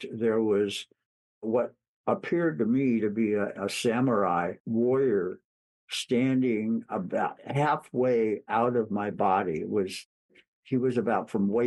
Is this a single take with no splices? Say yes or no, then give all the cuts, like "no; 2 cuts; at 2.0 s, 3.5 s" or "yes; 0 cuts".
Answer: no; 2 cuts; at 3.6 s, 4.6 s